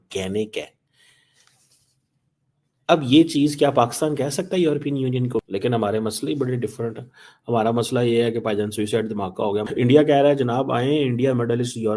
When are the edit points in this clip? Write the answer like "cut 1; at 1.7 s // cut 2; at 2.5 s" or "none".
cut 1; at 5.4 s // cut 2; at 9.7 s